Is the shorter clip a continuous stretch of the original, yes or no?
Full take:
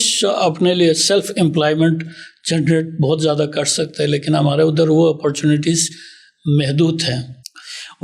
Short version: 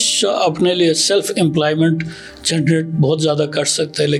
yes